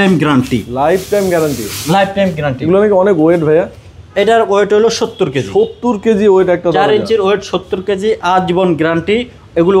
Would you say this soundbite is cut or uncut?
uncut